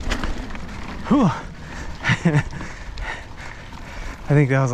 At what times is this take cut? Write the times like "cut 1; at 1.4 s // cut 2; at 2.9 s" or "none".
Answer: cut 1; at 3.7 s

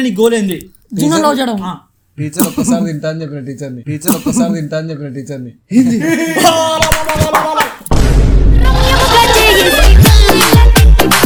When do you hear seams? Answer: none

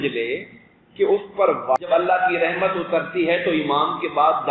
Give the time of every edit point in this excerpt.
cut 1; at 1.8 s

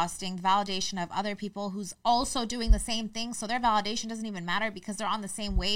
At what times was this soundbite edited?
none

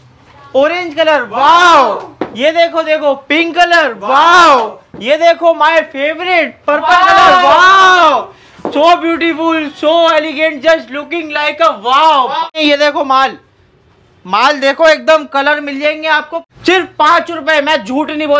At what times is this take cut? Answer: cut 1; at 12.4 s // cut 2; at 16.4 s

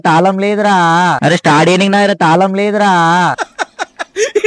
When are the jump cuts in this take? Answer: none

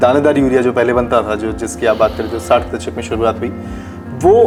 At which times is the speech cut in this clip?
none

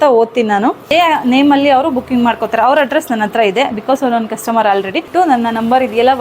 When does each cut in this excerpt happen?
cut 1; at 0.9 s // cut 2; at 5.1 s

